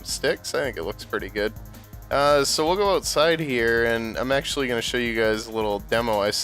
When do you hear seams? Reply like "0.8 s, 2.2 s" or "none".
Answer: 2.7 s